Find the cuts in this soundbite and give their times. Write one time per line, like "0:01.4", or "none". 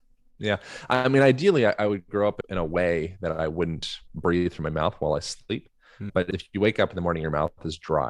0:02.4
0:06.3